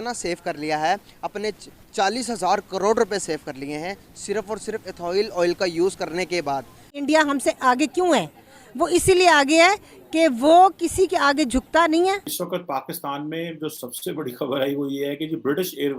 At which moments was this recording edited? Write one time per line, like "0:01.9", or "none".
0:07.0
0:12.4